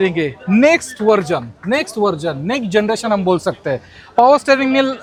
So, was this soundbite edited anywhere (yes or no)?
no